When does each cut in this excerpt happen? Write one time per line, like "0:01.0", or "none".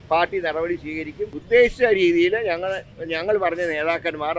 0:01.4